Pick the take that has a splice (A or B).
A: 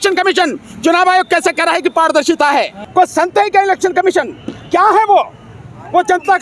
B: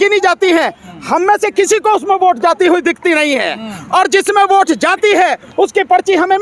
A